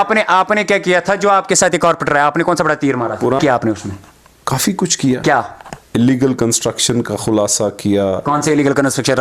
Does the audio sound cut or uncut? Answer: cut